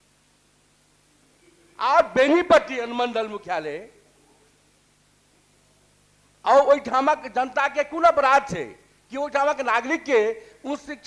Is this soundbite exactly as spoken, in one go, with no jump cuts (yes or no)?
yes